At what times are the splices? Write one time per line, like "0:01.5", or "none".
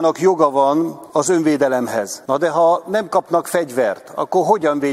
0:01.0
0:02.2